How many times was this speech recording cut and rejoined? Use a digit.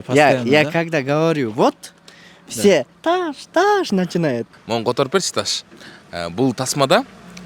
1